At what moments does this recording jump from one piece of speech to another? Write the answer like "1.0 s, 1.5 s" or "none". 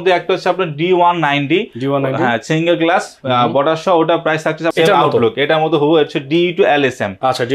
4.7 s